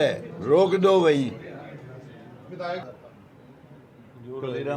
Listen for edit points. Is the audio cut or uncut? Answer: cut